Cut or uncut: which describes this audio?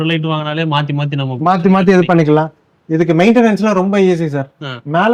uncut